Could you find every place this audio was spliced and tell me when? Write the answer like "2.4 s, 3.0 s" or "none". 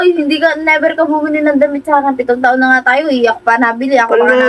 none